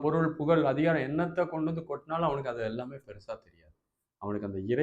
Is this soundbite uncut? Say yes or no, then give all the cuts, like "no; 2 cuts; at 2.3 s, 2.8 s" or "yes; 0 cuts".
yes; 0 cuts